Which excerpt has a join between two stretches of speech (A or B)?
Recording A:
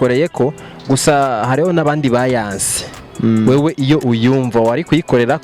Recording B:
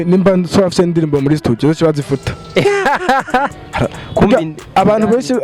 B